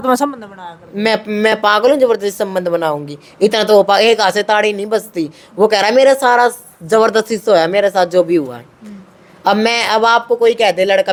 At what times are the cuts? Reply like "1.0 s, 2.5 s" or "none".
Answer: none